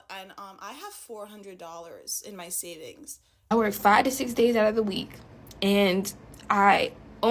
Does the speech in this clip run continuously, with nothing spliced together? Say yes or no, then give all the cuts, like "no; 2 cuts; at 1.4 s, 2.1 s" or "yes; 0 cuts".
no; 1 cut; at 3.4 s